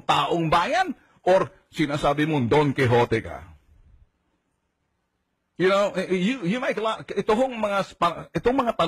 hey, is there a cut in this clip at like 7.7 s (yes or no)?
yes